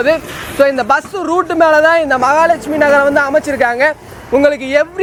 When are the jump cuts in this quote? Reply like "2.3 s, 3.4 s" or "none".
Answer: none

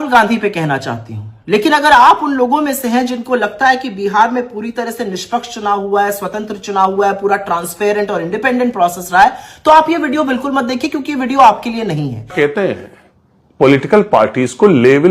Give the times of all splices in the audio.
12.2 s

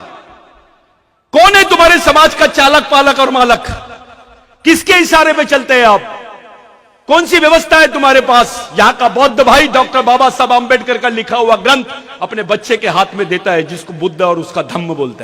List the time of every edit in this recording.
none

